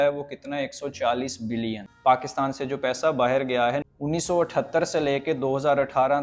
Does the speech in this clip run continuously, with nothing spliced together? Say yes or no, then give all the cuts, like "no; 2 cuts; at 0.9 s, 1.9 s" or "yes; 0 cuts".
no; 2 cuts; at 1.9 s, 3.8 s